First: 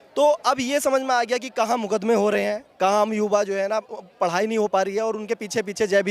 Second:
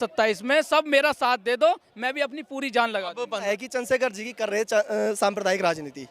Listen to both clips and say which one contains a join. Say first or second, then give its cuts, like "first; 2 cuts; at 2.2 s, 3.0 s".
second; 1 cut; at 3.4 s